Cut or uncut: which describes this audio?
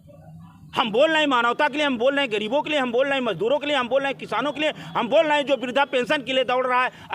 uncut